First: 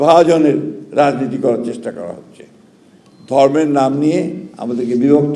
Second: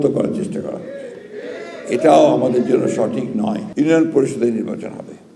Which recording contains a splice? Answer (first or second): second